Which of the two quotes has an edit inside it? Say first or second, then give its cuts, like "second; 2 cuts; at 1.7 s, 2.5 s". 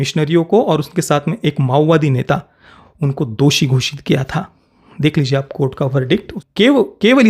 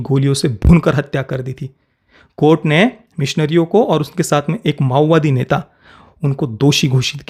first; 1 cut; at 6.4 s